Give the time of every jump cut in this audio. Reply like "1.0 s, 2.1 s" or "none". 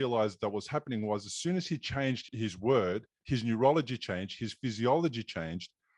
2.2 s